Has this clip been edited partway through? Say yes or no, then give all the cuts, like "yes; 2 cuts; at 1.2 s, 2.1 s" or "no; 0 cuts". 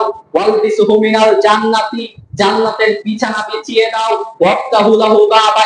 no; 0 cuts